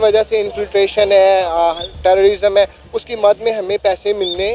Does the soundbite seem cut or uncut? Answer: uncut